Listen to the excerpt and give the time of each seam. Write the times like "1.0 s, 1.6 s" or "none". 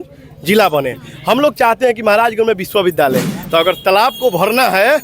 3.3 s